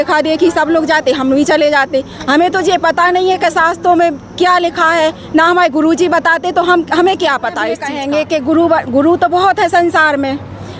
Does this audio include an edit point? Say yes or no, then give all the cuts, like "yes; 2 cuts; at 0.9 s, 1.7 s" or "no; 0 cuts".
yes; 1 cut; at 7.9 s